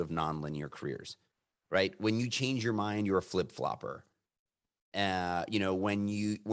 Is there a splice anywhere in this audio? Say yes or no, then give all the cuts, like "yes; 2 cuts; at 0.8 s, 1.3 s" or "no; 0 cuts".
no; 0 cuts